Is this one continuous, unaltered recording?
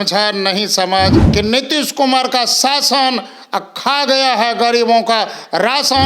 no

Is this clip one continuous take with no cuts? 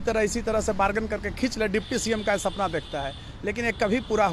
yes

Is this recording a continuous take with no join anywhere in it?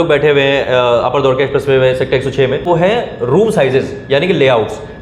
no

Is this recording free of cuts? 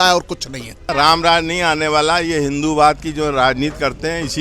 no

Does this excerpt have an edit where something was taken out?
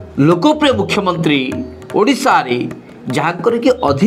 no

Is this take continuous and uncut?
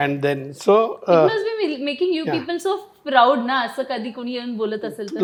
yes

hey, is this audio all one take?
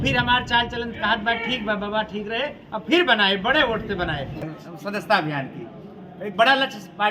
no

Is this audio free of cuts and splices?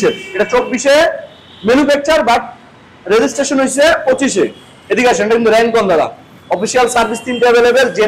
yes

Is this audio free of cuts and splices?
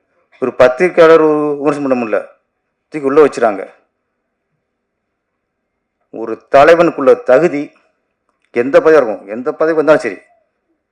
yes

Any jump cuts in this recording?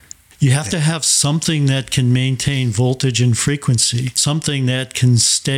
yes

